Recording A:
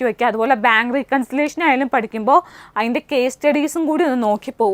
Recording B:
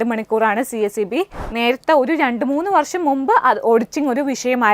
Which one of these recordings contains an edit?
B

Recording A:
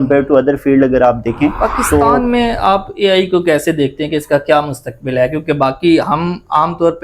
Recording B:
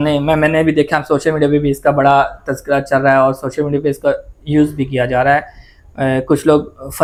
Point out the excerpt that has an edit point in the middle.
A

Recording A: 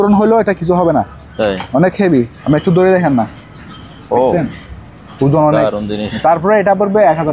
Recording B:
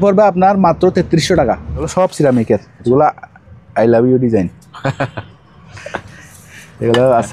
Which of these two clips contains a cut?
B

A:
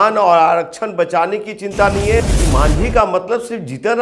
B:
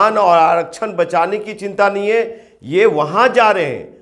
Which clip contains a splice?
A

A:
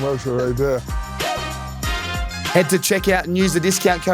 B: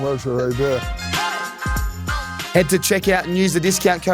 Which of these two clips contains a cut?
A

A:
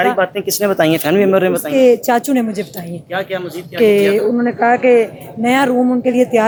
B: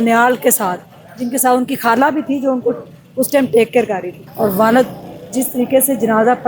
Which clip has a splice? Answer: B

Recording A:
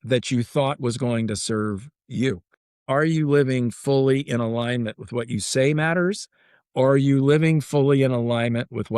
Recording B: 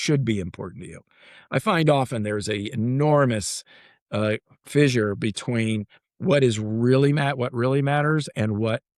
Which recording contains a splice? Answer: A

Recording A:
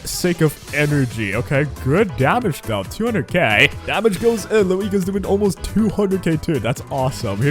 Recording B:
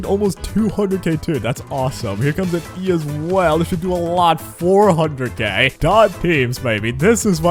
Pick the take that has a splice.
A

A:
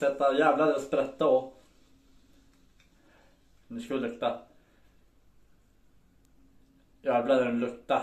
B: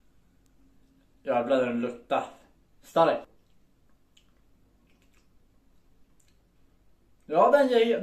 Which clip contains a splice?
B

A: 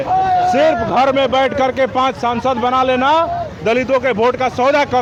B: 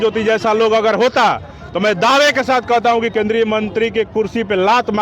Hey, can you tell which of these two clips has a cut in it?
B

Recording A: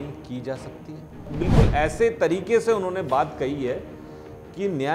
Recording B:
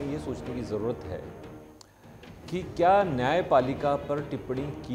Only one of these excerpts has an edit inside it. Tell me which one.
A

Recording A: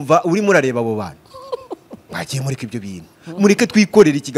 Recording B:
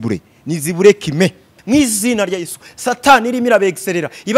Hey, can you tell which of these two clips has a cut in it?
B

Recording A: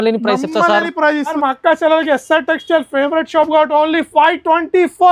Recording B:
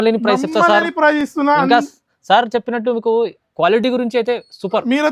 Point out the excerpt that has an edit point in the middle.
A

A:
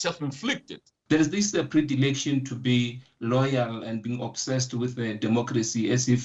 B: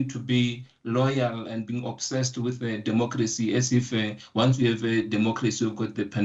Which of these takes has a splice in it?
A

